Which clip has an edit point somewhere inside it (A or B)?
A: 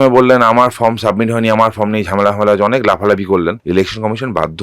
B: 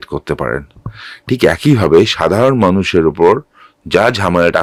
A